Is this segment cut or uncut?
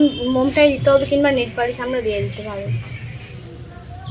uncut